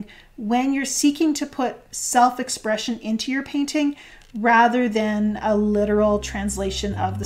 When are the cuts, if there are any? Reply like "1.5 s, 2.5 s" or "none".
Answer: none